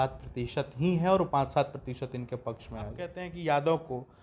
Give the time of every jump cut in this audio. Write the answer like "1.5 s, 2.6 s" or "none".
3.2 s